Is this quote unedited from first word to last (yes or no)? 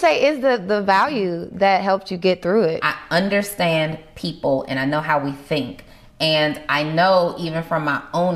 no